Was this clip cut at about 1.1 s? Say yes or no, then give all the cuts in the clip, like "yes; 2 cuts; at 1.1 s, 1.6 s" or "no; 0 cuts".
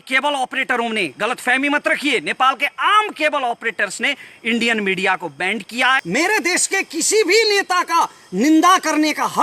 no; 1 cut; at 6.0 s